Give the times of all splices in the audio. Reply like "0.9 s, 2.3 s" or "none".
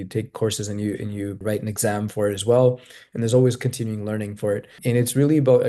1.4 s, 4.8 s